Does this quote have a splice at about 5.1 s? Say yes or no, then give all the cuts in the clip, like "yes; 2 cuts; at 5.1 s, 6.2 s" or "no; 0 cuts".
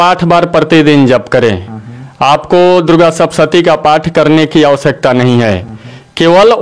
no; 0 cuts